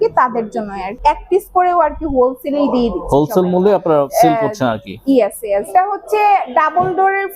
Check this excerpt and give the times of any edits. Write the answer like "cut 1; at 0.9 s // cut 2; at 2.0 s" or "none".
cut 1; at 0.9 s // cut 2; at 4.1 s // cut 3; at 5.7 s